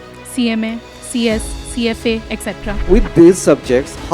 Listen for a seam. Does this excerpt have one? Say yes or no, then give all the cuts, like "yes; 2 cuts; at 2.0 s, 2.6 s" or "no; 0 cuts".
yes; 1 cut; at 2.7 s